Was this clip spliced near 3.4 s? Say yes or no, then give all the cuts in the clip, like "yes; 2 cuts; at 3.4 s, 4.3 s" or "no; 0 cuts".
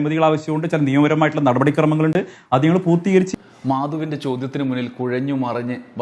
yes; 1 cut; at 3.4 s